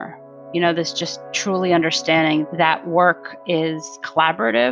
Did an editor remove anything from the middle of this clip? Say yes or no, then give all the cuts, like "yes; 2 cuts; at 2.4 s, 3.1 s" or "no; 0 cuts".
no; 0 cuts